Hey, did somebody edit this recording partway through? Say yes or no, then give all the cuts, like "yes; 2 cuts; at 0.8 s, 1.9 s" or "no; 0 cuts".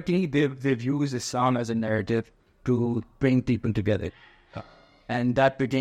no; 0 cuts